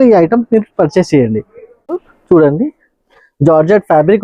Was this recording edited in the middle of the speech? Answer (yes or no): yes